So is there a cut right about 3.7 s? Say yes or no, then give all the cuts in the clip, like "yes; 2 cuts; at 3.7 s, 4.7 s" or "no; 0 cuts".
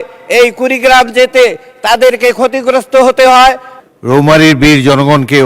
yes; 1 cut; at 3.7 s